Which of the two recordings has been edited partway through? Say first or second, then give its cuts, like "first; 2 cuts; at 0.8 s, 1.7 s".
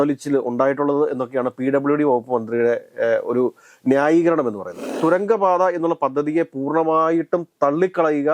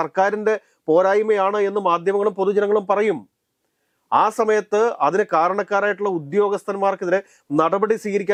first; 1 cut; at 4.9 s